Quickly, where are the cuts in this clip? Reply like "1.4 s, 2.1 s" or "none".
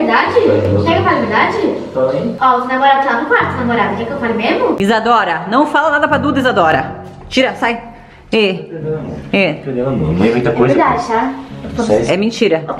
2.3 s, 4.8 s